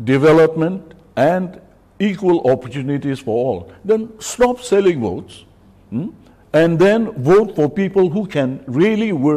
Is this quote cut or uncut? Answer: uncut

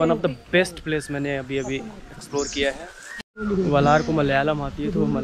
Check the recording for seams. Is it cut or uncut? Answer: uncut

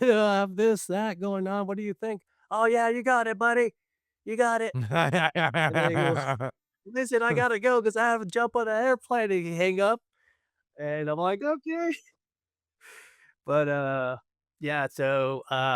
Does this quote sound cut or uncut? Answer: uncut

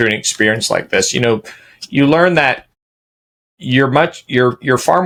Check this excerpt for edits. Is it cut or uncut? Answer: uncut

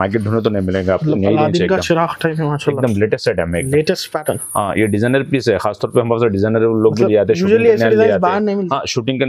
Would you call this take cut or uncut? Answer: uncut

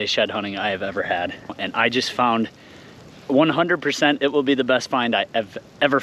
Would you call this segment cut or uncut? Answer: cut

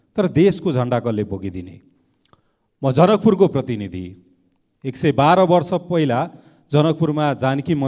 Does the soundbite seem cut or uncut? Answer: uncut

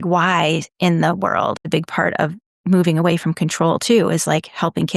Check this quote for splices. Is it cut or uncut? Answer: cut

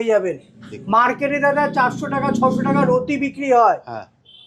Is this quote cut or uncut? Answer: uncut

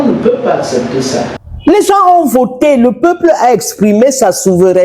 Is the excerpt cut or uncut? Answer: cut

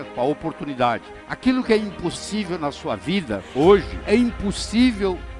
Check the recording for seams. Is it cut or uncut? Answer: cut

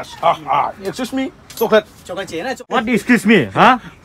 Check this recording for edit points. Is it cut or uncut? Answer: cut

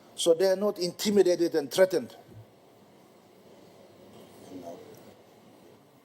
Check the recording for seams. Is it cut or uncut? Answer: cut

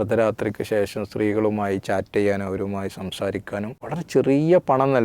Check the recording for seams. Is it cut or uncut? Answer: cut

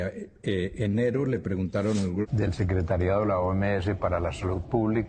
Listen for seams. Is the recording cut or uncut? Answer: cut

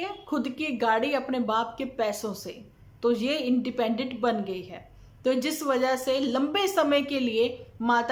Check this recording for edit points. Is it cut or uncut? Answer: uncut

